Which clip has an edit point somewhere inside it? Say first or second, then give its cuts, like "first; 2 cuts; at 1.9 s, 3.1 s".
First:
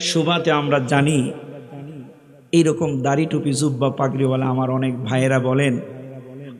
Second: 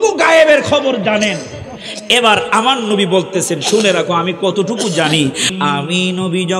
second; 1 cut; at 5.5 s